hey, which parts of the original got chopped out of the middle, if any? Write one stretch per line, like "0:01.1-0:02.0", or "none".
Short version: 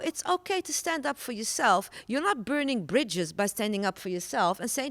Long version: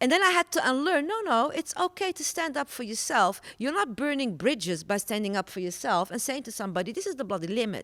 none